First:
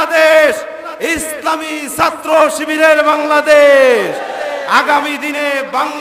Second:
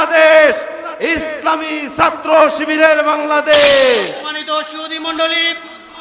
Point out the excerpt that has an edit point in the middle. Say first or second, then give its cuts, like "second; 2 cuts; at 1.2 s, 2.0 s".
second; 1 cut; at 4.2 s